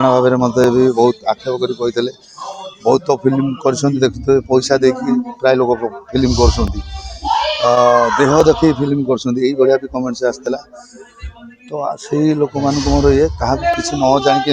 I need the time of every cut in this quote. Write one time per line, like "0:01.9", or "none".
none